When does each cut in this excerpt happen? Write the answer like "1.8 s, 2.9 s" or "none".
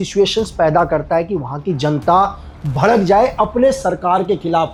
none